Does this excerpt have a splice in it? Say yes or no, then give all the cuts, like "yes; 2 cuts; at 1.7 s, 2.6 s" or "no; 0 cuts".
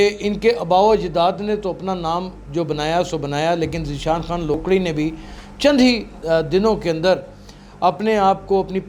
no; 0 cuts